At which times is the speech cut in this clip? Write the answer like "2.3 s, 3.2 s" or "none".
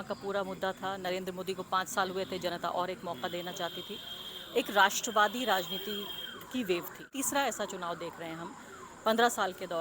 7.1 s